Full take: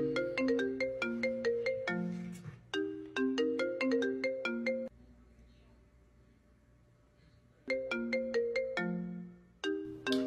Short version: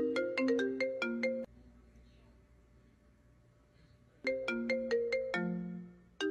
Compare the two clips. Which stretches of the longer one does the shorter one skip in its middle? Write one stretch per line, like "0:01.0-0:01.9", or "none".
0:01.4-0:04.8